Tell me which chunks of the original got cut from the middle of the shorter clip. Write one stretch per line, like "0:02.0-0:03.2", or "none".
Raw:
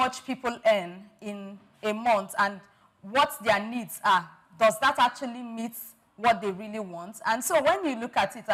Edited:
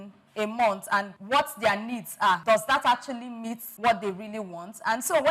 0:02.6-0:03.0
0:04.2-0:04.5
0:05.7-0:06.0

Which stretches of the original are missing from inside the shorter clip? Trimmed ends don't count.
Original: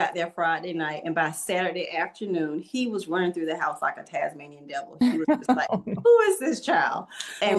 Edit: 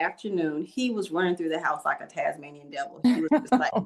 none

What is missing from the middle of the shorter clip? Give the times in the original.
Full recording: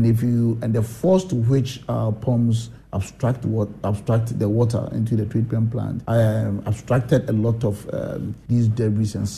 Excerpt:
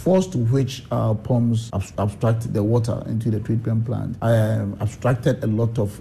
0:02.8-0:03.7

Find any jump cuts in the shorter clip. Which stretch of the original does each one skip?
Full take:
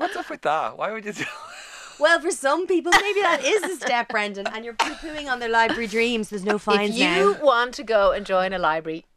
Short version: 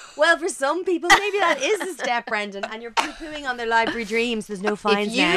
none

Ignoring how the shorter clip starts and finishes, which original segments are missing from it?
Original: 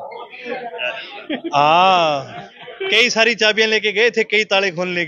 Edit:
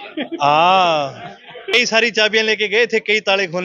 0:02.8-0:02.9

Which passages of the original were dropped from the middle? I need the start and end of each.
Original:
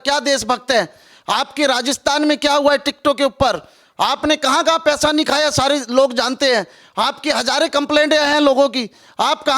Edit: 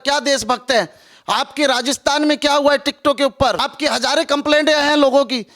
0:03.7-0:07.1

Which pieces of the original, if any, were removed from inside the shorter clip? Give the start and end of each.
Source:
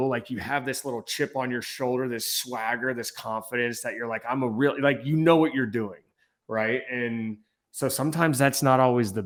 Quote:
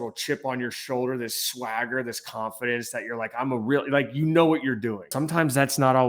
0:06.0-0:08.0

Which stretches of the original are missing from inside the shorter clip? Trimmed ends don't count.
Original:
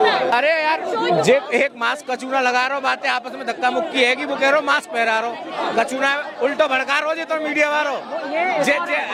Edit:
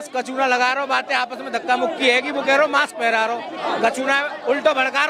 none

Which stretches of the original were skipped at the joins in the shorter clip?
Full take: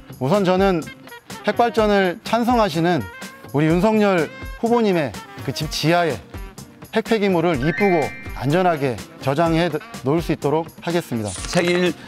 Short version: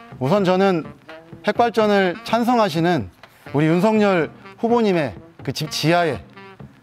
none

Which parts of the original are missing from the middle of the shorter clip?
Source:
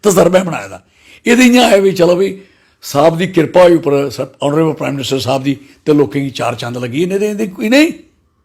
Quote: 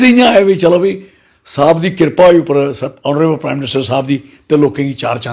none

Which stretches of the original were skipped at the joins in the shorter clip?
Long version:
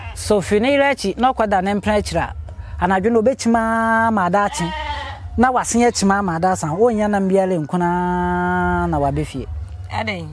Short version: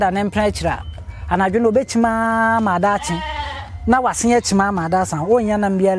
none

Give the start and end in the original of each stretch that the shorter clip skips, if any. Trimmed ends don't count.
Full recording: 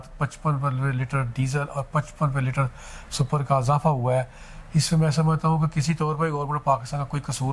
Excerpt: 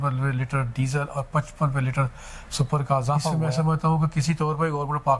0:04.0-0:05.0

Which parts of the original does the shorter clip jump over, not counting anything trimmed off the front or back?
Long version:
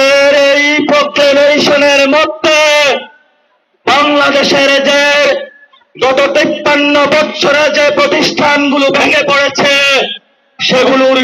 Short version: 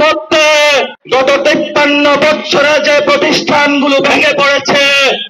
0:03.1-0:05.9

